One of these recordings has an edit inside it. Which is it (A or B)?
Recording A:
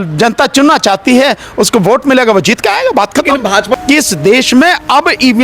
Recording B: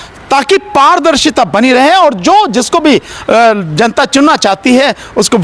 A